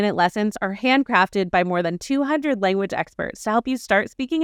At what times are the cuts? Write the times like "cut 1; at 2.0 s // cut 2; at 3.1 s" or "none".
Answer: none

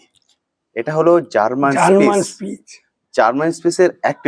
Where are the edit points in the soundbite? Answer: none

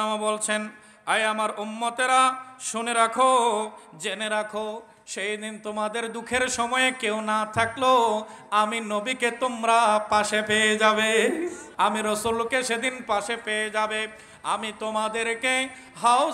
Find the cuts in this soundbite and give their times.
cut 1; at 11.6 s

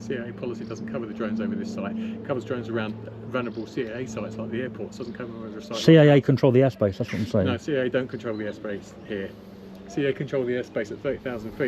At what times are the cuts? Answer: none

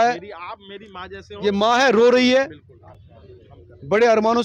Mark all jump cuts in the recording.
none

